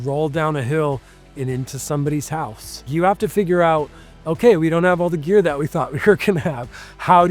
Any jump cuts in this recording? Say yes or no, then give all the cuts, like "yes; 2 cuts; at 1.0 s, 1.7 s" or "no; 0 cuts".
yes; 1 cut; at 2.9 s